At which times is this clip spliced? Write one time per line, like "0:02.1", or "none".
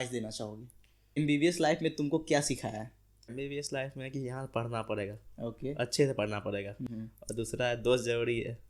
0:01.2
0:03.3
0:06.9